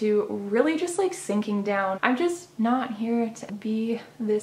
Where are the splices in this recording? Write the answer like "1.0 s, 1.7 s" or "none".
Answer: 2.0 s, 3.4 s

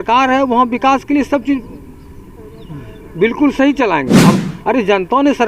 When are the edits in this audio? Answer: 4.4 s

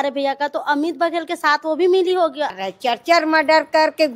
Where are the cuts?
2.6 s

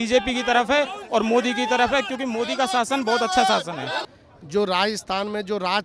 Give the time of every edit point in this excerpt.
4.0 s

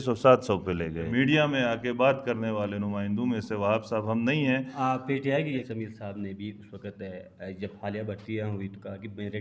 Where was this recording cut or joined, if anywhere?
1.1 s, 5.6 s

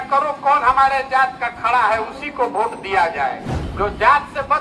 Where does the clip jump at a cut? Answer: 3.6 s

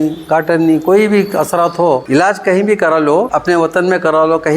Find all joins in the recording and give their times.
2.0 s, 3.3 s

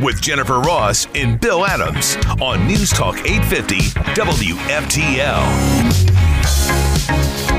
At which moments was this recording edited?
none

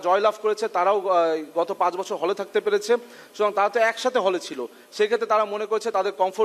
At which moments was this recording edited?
none

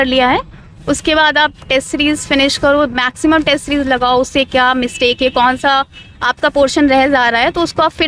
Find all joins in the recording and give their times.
none

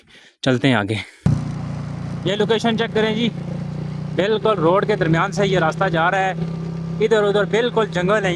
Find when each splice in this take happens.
none

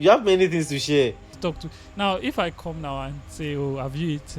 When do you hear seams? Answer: 1.4 s

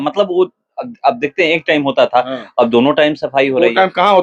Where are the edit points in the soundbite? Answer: none

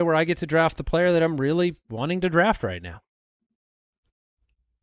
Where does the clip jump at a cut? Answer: none

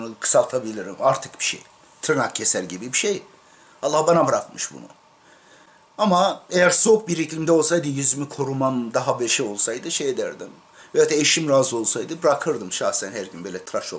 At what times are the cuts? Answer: none

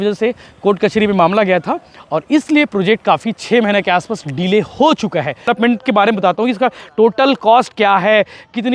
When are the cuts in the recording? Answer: 5.4 s

